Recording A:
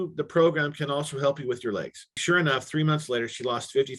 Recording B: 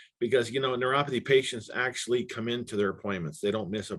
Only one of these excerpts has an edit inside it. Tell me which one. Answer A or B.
A